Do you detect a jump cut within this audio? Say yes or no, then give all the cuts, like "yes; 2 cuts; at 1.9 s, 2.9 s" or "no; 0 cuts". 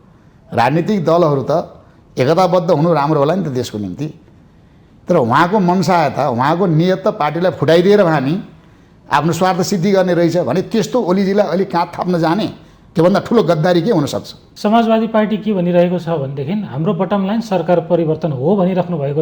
yes; 1 cut; at 14.4 s